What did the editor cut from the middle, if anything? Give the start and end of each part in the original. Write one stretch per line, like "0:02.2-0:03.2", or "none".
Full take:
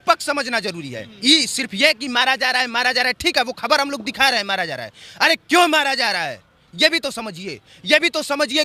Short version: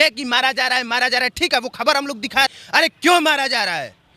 0:04.4-0:05.0

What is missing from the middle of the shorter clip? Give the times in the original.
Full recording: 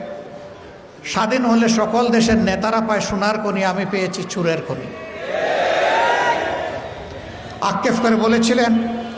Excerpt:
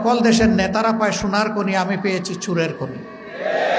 none

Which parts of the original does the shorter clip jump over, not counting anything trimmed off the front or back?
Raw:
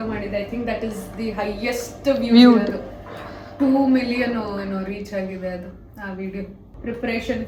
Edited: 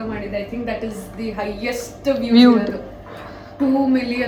none

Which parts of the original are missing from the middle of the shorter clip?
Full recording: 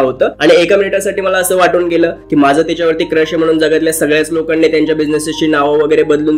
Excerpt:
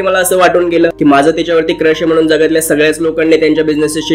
0:02.1-0:02.3

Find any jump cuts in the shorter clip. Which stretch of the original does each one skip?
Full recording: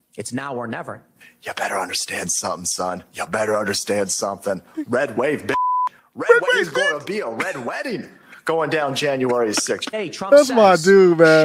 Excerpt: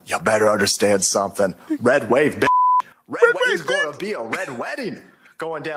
none

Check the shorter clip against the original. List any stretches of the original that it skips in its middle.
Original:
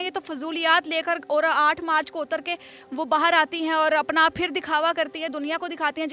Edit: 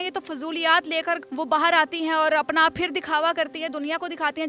0:01.2-0:02.8

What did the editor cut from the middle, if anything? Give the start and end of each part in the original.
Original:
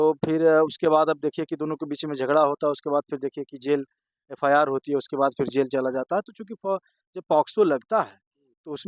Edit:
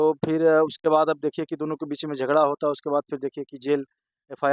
none

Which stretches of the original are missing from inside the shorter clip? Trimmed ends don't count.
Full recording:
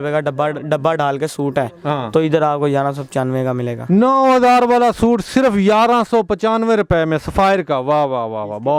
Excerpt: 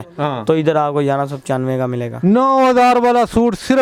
none

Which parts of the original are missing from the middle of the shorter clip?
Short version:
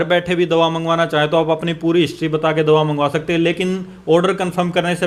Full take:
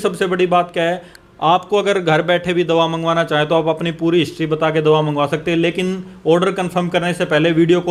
none

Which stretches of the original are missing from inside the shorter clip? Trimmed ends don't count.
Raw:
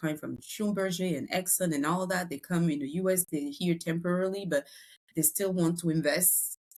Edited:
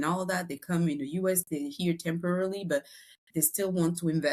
none

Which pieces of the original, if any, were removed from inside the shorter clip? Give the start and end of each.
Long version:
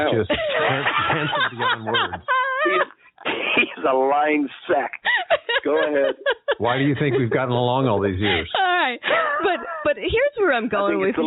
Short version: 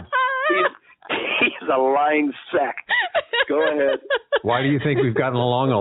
none

